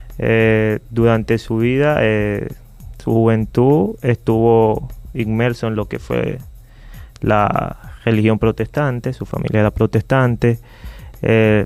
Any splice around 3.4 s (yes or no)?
yes